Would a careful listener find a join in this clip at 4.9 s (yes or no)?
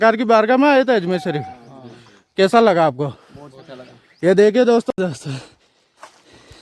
yes